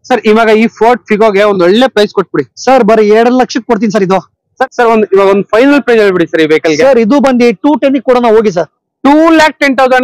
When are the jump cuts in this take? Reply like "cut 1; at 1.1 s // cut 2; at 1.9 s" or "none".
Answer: cut 1; at 4.5 s